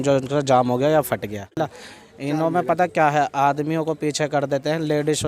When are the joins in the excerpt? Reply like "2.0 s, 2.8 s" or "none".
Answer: 1.6 s